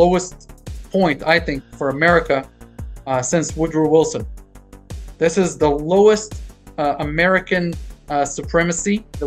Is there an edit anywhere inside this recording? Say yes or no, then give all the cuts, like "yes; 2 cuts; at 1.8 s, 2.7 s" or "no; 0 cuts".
no; 0 cuts